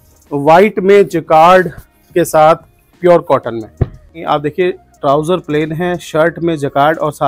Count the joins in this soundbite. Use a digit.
1